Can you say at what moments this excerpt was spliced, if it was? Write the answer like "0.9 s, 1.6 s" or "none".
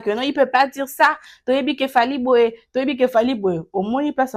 none